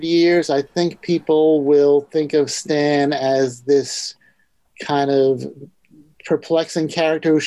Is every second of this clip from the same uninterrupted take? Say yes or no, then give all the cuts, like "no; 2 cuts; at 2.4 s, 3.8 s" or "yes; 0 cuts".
yes; 0 cuts